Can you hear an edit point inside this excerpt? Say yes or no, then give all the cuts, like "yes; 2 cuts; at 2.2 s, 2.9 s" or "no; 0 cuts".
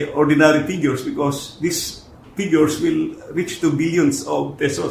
no; 0 cuts